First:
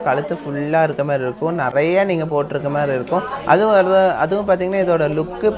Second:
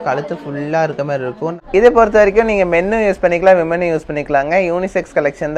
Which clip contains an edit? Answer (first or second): second